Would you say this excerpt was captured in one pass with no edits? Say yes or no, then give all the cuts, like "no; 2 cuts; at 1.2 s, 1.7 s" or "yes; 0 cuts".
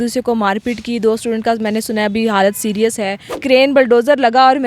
no; 1 cut; at 3.3 s